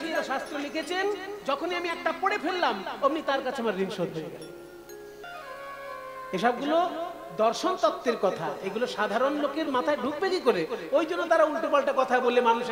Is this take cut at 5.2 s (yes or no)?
yes